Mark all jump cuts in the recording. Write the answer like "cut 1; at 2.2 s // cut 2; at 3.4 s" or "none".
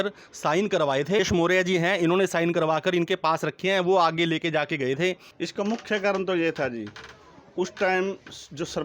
cut 1; at 1.2 s // cut 2; at 5.3 s